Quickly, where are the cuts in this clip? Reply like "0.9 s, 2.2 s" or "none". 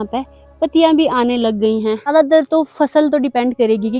2.1 s